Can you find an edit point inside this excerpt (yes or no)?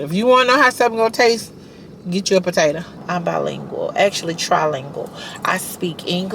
yes